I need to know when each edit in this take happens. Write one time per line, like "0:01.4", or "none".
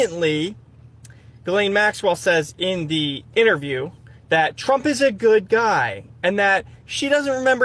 none

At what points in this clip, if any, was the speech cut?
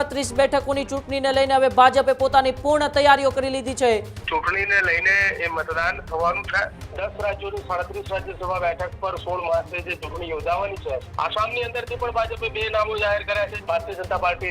0:04.2
0:06.8
0:11.1
0:13.6

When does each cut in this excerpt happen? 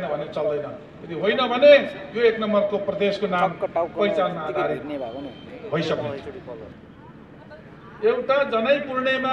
0:06.7

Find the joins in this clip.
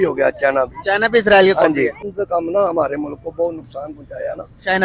0:02.0

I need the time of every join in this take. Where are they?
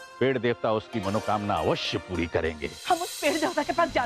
0:02.7

